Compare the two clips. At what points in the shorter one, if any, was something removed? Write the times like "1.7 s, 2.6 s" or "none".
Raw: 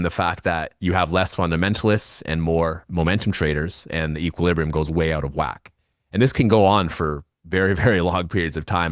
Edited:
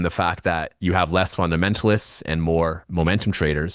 none